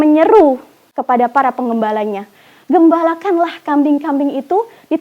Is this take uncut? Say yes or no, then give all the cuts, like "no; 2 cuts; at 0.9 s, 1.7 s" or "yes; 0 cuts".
no; 1 cut; at 0.9 s